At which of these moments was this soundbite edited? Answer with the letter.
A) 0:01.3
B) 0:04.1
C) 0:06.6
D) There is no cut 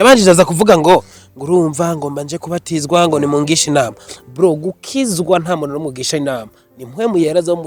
D